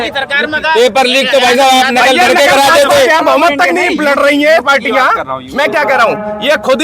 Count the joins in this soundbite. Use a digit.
1